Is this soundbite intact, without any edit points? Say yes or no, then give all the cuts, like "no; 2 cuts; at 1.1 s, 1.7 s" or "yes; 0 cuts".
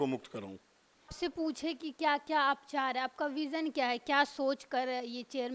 no; 1 cut; at 1.2 s